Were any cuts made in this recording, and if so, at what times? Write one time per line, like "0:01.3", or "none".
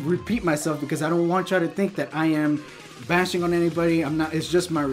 none